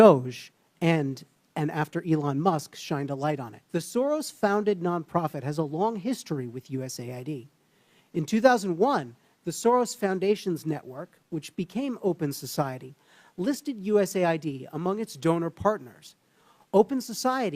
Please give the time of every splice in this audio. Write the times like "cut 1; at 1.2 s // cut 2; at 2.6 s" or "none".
cut 1; at 3.5 s